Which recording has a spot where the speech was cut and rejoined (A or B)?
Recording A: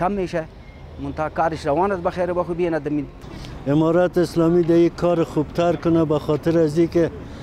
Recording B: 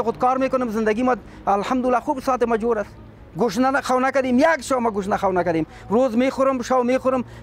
A